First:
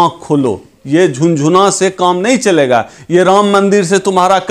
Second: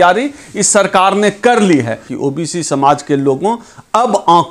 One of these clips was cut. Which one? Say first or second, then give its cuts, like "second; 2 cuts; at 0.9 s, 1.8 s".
second; 1 cut; at 2.0 s